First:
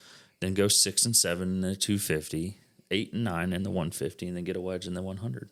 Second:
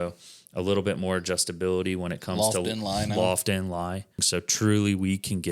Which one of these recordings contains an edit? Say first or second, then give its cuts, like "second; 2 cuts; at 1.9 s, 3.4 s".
second; 1 cut; at 4.2 s